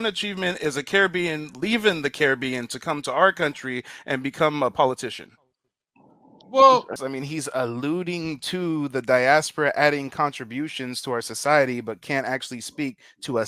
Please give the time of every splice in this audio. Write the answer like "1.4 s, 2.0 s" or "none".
7.0 s